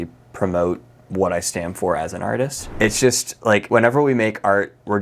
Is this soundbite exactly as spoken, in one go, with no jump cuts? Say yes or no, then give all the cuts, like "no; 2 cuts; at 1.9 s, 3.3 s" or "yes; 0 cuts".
no; 2 cuts; at 2.6 s, 3.6 s